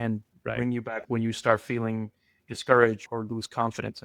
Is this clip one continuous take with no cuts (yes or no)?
no